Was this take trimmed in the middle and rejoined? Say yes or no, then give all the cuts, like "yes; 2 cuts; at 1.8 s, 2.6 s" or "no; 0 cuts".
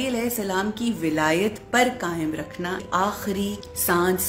yes; 1 cut; at 3.2 s